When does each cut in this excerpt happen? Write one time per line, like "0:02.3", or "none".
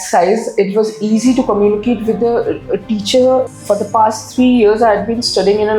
0:03.5